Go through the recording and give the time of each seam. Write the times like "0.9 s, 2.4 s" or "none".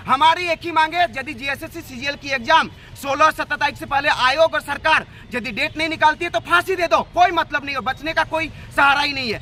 none